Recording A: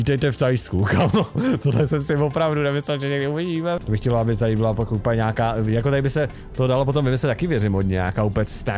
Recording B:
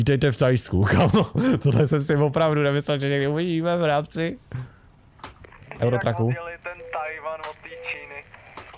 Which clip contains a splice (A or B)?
A